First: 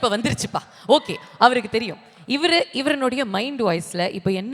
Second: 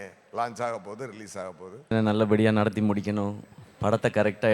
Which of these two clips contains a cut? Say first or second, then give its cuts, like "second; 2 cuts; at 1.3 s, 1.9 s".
second; 1 cut; at 1.9 s